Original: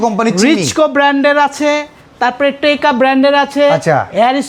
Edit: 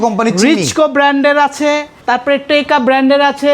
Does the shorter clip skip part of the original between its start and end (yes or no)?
yes